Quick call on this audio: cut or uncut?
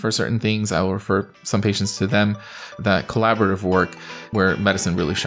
cut